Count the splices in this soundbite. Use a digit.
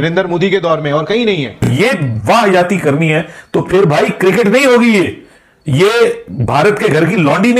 1